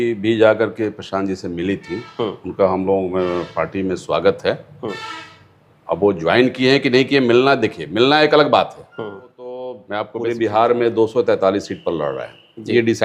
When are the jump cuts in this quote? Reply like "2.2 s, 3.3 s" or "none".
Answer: 9.8 s